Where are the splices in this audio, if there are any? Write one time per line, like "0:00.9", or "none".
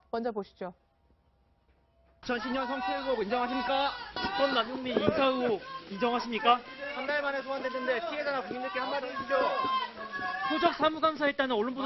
none

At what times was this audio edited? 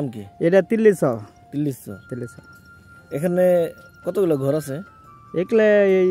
none

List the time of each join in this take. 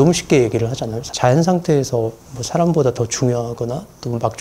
0:01.0

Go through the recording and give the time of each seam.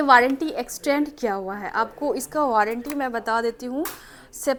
none

